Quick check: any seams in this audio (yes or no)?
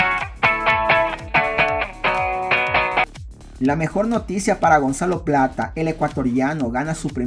yes